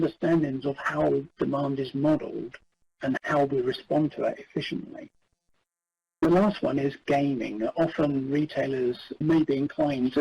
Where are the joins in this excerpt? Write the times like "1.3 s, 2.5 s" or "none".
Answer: 6.2 s, 9.1 s